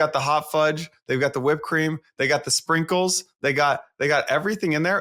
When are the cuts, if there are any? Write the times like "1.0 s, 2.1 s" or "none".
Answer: none